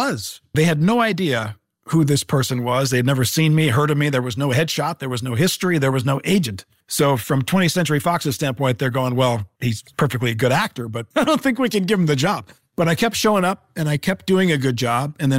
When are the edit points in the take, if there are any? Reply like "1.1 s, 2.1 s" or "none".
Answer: none

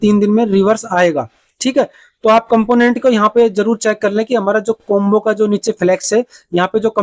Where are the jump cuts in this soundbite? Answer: none

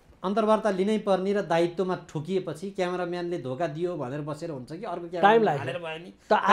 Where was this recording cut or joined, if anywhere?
none

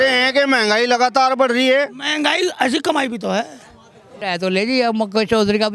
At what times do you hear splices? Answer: 4.1 s

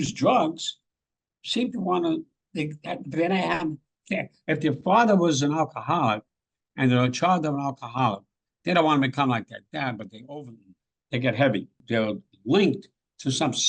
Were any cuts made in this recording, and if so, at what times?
11.8 s

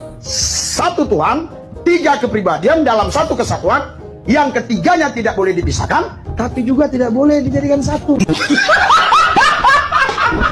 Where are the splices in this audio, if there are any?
none

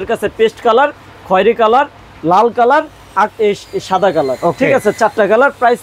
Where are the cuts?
none

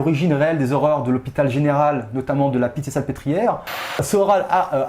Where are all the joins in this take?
4.0 s

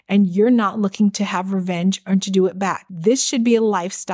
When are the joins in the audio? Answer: 2.9 s

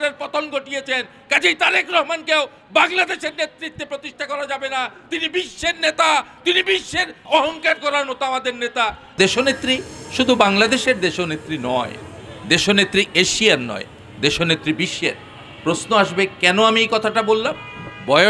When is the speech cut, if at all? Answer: 9.0 s

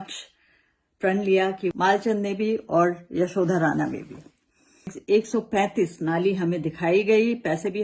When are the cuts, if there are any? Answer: 1.7 s, 5.0 s

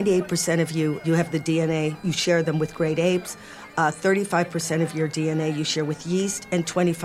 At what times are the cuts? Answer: 1.0 s, 2.0 s

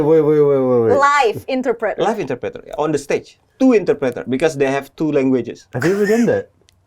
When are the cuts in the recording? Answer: none

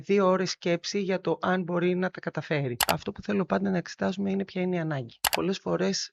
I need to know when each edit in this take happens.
2.8 s, 5.3 s

